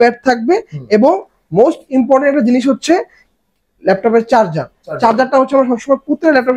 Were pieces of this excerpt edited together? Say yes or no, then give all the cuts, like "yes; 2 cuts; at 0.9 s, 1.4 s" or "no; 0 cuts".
no; 0 cuts